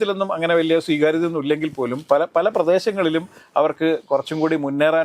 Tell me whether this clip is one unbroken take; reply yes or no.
yes